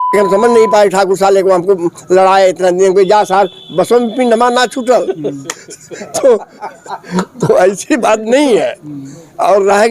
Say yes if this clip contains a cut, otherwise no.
no